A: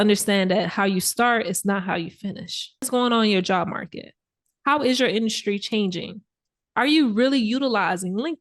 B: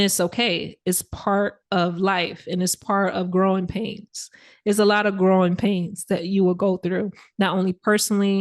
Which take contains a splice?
A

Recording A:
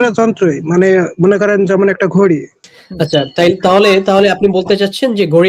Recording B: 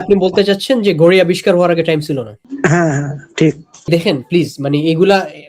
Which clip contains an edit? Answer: B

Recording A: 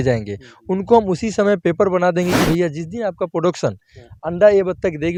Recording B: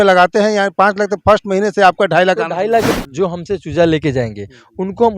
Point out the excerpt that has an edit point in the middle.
B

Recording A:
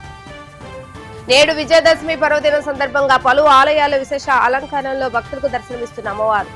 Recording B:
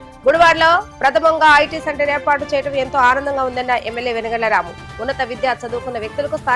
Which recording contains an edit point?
A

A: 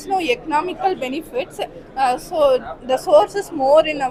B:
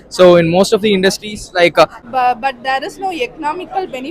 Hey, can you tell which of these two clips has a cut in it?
B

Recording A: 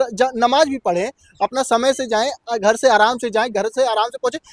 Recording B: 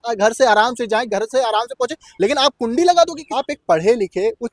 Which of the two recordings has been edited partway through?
B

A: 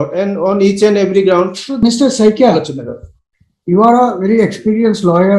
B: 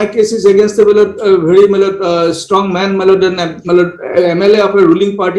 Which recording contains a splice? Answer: A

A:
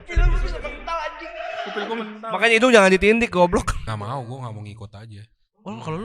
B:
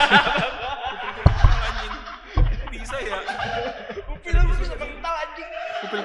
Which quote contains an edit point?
A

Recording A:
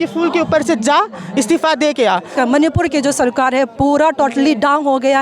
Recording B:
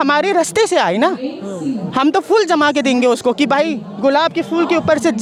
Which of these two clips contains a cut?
A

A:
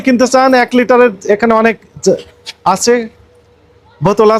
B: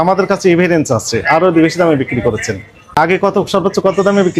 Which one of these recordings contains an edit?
B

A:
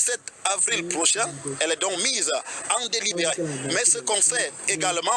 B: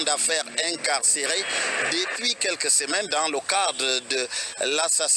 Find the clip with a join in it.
B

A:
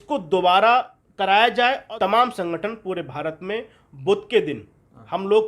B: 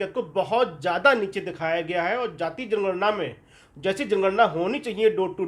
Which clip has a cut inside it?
A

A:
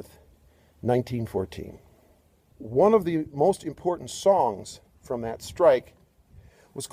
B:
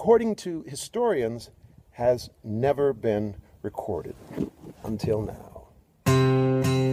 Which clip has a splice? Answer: B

